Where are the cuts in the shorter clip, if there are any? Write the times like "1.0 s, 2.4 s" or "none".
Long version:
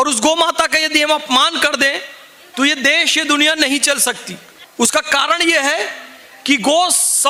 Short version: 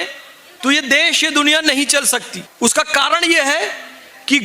2.4 s